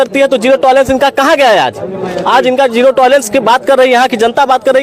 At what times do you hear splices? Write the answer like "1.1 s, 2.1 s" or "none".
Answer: none

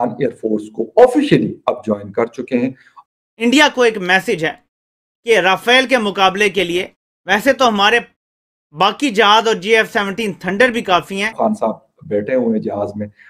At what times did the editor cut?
2.8 s, 11.3 s

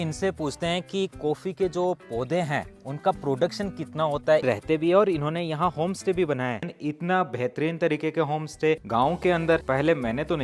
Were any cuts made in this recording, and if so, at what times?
4.4 s, 6.6 s, 8.8 s, 9.6 s

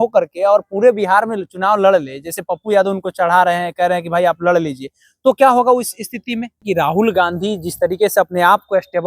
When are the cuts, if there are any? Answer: 6.6 s

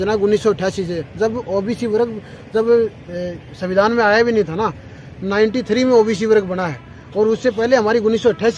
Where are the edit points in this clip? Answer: none

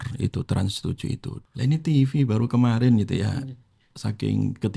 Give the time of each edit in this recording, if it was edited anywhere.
1.3 s

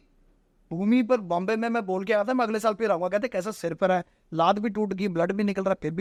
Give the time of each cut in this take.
none

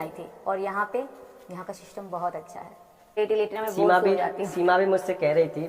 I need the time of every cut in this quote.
3.2 s

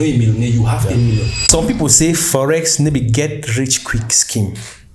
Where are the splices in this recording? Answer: 1.4 s

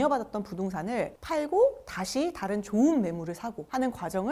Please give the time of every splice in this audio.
1.2 s

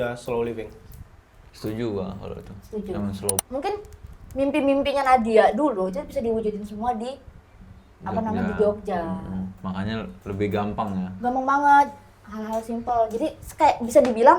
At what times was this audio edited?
3.3 s

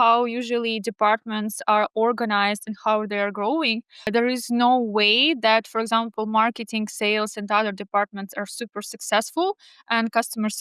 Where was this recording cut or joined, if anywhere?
none

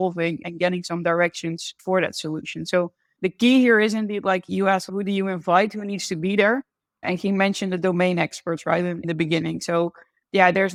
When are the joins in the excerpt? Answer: none

